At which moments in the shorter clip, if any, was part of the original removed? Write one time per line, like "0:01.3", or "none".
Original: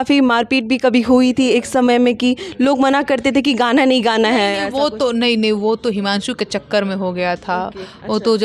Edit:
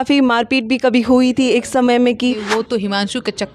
0:02.5